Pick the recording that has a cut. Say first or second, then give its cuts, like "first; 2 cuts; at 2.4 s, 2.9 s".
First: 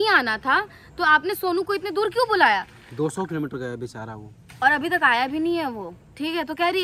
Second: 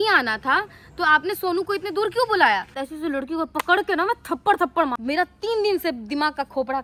second; 2 cuts; at 2.8 s, 4.9 s